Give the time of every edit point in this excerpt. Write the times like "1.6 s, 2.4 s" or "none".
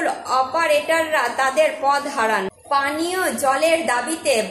2.6 s